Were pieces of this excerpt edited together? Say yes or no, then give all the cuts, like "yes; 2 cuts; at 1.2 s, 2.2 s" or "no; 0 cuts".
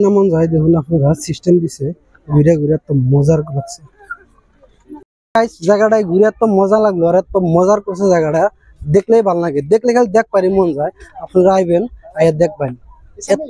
yes; 1 cut; at 5.2 s